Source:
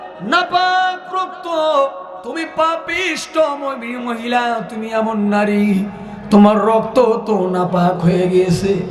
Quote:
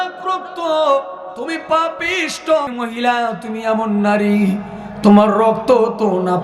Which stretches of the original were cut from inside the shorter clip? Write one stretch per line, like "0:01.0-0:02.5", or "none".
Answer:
0:03.6-0:04.0